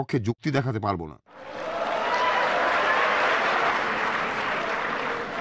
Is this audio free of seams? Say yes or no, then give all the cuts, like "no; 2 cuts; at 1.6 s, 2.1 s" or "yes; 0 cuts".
no; 2 cuts; at 1.5 s, 3.7 s